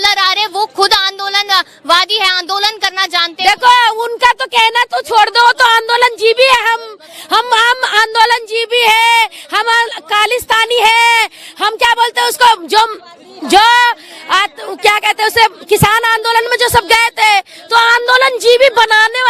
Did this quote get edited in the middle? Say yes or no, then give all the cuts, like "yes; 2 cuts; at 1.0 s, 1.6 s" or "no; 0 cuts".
no; 0 cuts